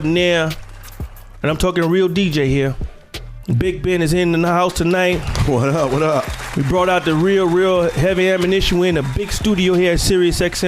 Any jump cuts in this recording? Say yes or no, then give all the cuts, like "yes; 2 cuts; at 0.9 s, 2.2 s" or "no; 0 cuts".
yes; 1 cut; at 3.8 s